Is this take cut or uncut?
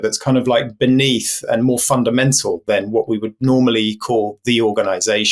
uncut